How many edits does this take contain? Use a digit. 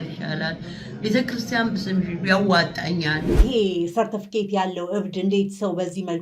1